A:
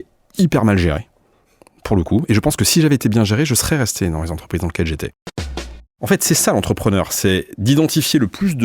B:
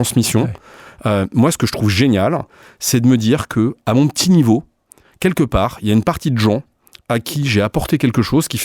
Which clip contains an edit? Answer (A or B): A